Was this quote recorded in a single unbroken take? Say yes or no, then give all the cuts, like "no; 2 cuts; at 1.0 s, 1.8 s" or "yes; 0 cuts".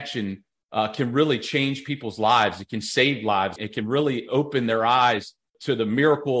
no; 2 cuts; at 3.6 s, 5.5 s